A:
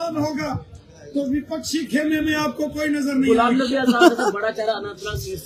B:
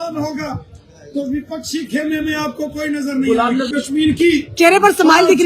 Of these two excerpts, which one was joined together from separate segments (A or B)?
B